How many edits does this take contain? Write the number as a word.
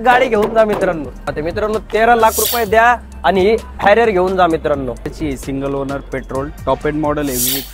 two